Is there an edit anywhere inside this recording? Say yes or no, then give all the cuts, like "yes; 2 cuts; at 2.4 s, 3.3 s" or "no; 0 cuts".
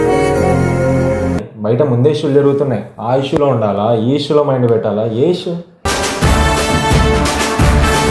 yes; 1 cut; at 1.4 s